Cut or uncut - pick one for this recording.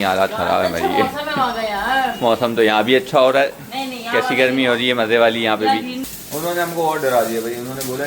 cut